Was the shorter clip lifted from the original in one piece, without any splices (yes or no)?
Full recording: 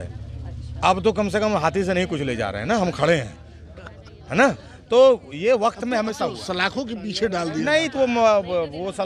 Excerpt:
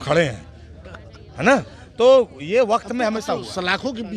yes